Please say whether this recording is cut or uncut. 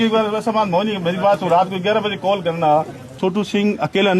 cut